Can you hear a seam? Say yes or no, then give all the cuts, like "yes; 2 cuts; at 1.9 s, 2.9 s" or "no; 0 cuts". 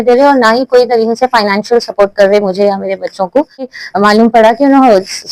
yes; 1 cut; at 3.6 s